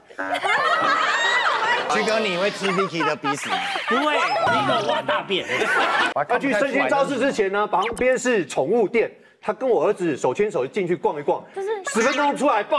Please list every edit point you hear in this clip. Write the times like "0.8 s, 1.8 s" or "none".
1.9 s, 4.5 s, 6.1 s